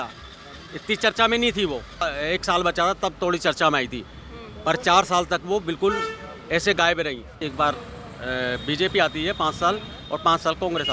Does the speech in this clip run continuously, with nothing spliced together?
no; 2 cuts; at 2.0 s, 7.5 s

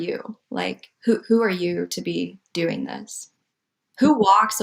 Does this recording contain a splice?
yes; 1 cut; at 3.3 s

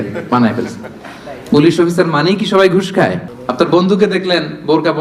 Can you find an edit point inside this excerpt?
yes; 1 cut; at 3.3 s

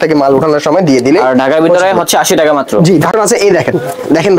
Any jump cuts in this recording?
yes; 1 cut; at 3.1 s

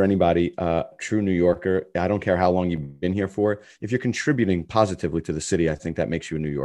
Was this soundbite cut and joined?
yes; 1 cut; at 0.9 s

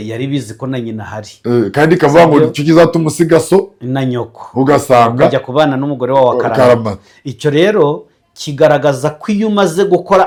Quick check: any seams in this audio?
no; 0 cuts

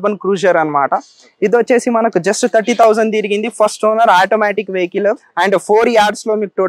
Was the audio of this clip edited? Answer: yes; 1 cut; at 5.3 s

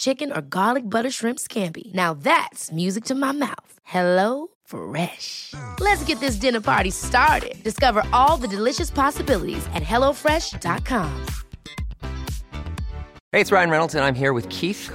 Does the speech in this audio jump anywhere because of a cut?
yes; 1 cut; at 13.1 s

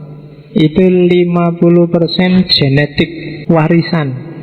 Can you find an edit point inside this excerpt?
yes; 1 cut; at 3.3 s

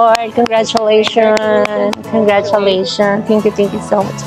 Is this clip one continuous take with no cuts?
yes; 0 cuts

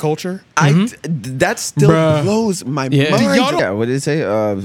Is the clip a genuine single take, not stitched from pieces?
no; 1 cut; at 3.6 s

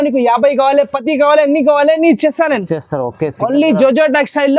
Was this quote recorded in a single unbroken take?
yes; 0 cuts

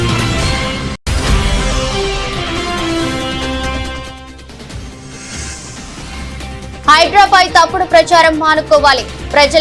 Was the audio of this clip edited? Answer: yes; 1 cut; at 1.0 s

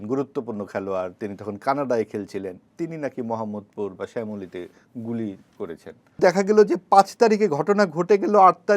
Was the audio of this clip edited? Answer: yes; 1 cut; at 6.2 s

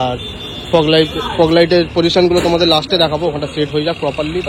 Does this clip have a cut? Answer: no; 0 cuts

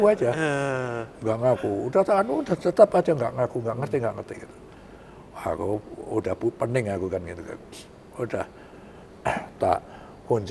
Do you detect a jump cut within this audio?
no; 0 cuts

